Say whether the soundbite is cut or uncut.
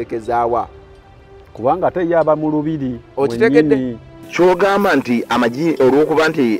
cut